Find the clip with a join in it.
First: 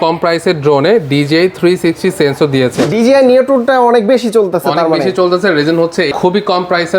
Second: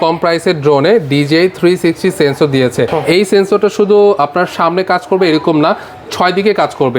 first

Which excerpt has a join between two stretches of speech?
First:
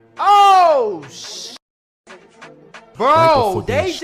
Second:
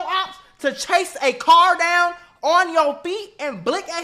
first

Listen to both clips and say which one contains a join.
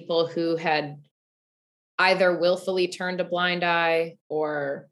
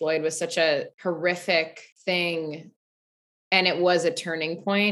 second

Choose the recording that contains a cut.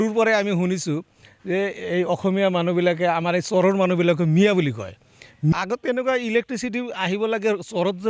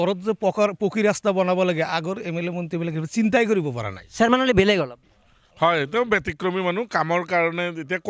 first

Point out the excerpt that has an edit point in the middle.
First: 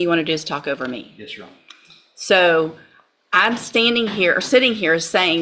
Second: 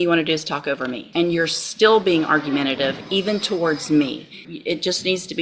second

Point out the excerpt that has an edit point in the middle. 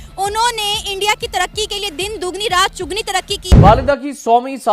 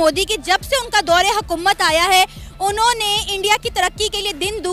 first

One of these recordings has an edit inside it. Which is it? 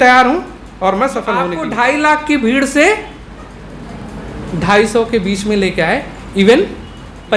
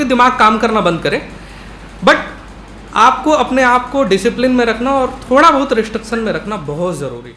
first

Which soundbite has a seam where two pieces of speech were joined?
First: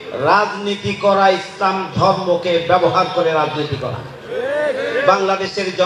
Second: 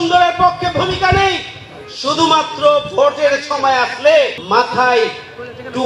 second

